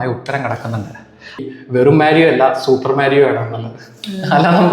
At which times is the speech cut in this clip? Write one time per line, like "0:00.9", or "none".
0:01.4